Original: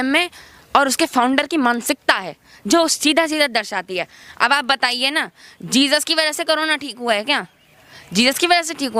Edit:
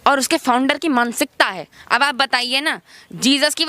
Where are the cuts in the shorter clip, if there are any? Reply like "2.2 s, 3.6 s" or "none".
1.7 s